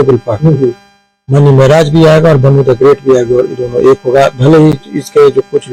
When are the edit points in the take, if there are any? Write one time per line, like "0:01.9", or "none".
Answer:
none